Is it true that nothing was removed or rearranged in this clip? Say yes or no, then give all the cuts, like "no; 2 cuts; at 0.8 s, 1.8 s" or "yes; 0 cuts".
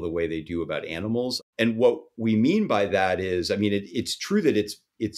no; 1 cut; at 1.3 s